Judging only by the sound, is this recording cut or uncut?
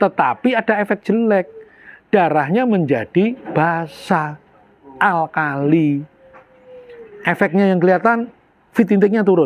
uncut